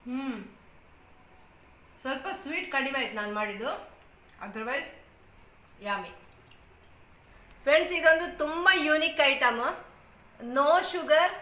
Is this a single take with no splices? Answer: no; 1 cut; at 7.3 s

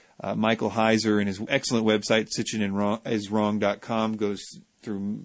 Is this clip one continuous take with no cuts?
no; 1 cut; at 4.1 s

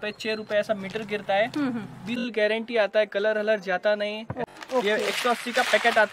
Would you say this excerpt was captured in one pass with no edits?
no; 2 cuts; at 2.3 s, 4.4 s

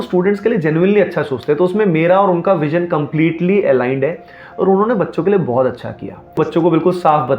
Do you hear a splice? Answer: yes; 1 cut; at 6.4 s

